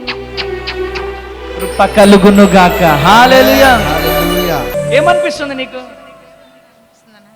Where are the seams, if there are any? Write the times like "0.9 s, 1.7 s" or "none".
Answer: 4.7 s